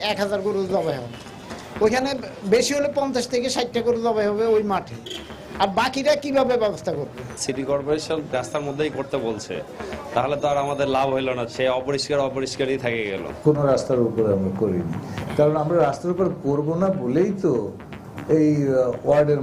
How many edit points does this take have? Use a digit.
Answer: 3